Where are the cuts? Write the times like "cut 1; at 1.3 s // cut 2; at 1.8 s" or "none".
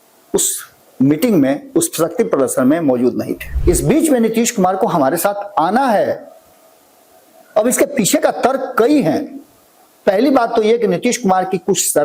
cut 1; at 3.4 s